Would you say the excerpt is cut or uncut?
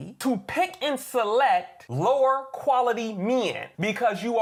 uncut